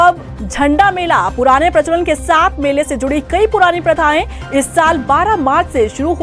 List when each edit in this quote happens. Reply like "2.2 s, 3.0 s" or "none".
none